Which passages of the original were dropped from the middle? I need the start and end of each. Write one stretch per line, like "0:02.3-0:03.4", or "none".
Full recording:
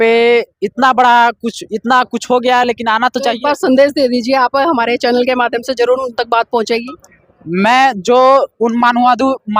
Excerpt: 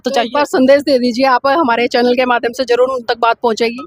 none